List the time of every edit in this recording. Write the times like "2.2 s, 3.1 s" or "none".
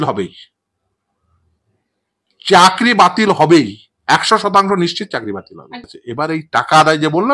5.8 s